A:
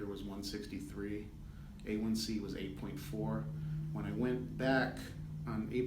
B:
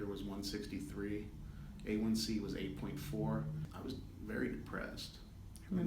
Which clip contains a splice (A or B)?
B